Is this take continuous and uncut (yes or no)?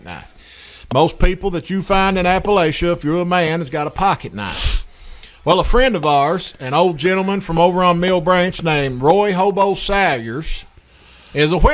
yes